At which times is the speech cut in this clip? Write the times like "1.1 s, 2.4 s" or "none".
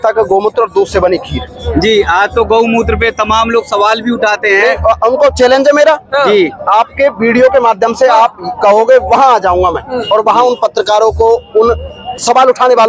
none